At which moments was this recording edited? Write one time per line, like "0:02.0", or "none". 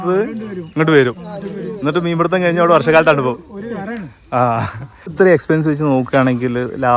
0:05.1